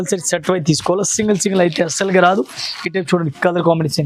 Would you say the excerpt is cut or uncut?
uncut